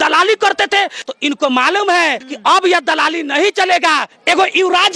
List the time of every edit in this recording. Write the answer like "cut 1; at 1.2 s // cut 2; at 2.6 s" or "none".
none